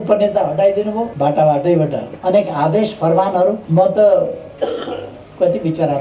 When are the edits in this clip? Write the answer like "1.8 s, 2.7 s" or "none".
1.1 s, 2.1 s, 3.6 s, 4.5 s